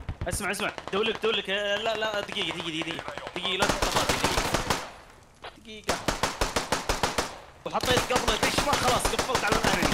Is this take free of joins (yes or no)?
no